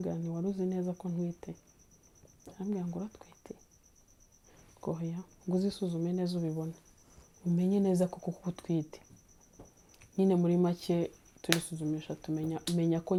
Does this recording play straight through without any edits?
yes; 0 cuts

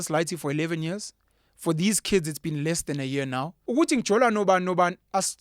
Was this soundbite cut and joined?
yes; 1 cut; at 3.5 s

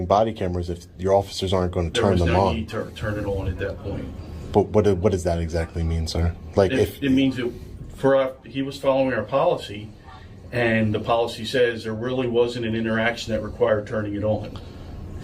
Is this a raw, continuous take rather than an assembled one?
yes; 0 cuts

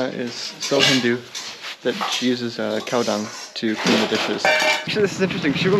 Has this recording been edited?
yes; 1 cut; at 4.9 s

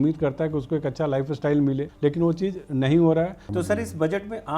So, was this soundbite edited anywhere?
yes; 2 cuts; at 1.9 s, 3.4 s

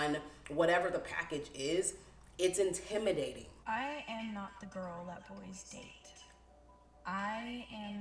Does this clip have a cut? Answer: yes; 1 cut; at 3.5 s

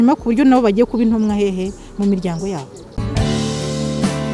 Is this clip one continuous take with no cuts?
no; 1 cut; at 2.9 s

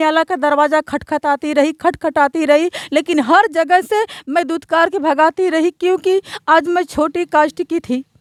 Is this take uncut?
yes; 0 cuts

